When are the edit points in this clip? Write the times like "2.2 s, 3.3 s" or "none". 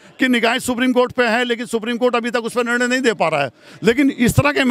none